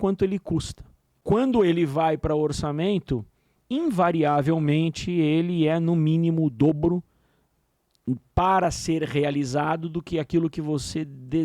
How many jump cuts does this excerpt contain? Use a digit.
1